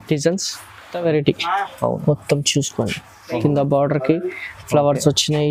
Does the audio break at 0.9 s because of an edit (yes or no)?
yes